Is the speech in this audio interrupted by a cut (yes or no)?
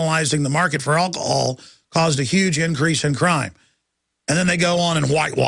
no